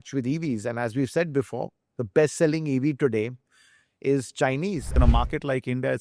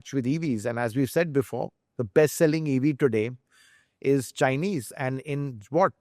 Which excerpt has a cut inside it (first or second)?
first